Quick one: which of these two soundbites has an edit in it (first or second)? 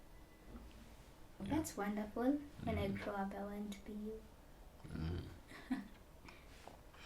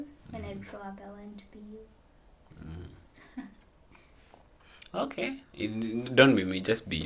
first